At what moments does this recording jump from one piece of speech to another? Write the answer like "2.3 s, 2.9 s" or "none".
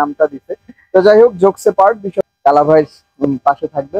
2.1 s